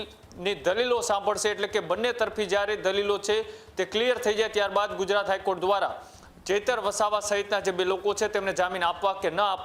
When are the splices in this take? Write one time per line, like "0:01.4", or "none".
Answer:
none